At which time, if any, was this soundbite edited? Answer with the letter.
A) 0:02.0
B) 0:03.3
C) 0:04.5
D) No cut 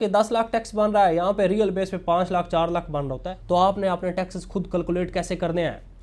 B